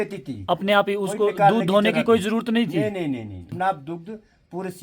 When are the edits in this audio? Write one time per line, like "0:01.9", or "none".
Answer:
0:03.6